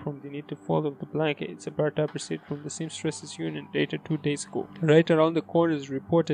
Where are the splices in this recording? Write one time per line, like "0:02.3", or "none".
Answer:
0:04.7